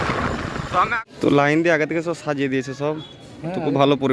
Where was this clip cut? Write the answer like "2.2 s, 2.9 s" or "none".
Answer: 0.9 s